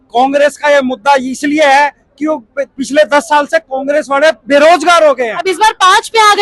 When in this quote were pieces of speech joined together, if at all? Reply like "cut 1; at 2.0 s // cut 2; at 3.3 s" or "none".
cut 1; at 5.4 s